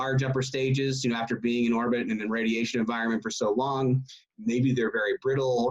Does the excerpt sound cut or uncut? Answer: uncut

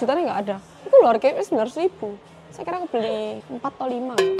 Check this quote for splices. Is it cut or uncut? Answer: cut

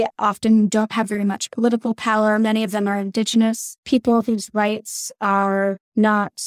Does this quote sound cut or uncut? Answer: uncut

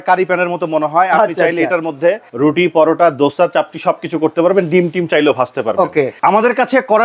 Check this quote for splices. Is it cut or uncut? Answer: cut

